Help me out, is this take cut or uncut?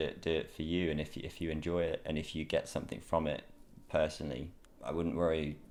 uncut